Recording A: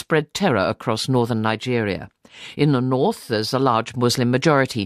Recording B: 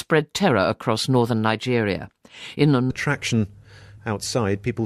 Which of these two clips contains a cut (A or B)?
A